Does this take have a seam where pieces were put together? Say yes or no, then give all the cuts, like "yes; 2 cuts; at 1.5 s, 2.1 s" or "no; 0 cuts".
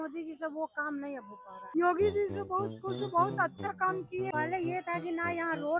yes; 2 cuts; at 1.5 s, 4.3 s